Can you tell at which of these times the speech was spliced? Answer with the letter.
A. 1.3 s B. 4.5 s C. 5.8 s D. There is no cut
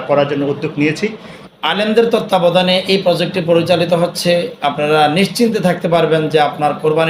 A